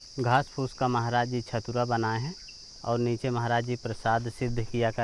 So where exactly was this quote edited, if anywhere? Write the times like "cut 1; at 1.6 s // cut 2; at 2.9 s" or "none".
none